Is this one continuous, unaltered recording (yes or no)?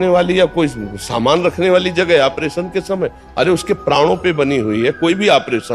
yes